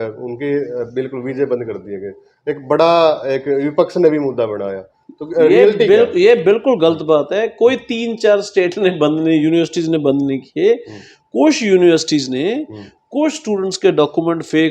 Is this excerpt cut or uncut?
uncut